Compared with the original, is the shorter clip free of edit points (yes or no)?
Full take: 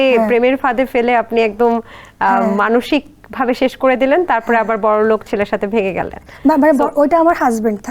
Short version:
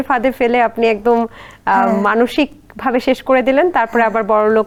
yes